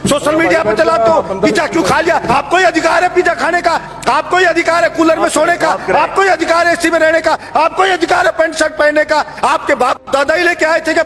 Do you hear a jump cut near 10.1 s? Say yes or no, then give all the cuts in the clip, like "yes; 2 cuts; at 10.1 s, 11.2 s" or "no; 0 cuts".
no; 1 cut; at 2.3 s